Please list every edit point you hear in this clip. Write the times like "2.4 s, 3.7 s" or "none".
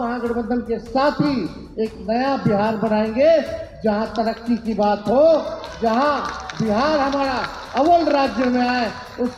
none